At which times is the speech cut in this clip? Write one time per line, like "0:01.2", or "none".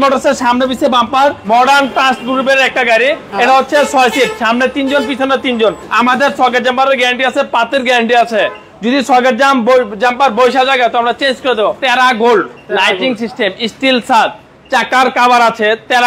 0:01.4
0:05.9
0:11.8